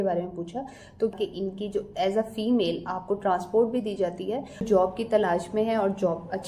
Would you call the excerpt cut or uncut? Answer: cut